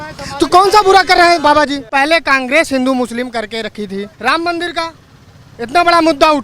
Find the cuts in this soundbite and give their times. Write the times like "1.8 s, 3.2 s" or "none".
1.8 s, 4.1 s